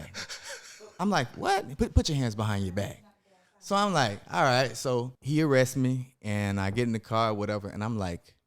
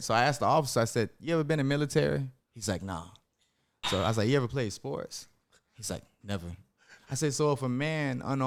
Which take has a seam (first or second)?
first